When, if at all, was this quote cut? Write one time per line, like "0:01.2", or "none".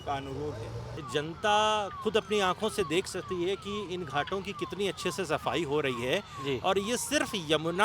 0:01.0